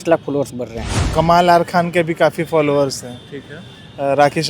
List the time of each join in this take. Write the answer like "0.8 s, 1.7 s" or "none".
0.9 s